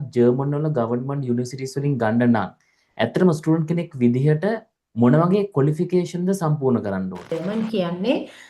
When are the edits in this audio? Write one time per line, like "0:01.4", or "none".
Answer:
0:07.4